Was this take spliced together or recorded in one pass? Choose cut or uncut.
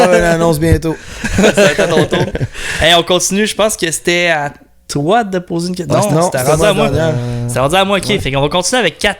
uncut